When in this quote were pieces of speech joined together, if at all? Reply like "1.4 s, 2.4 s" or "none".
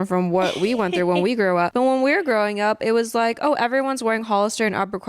none